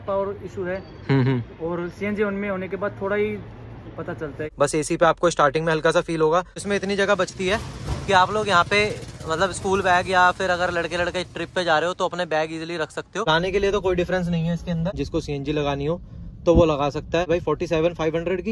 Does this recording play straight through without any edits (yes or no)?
no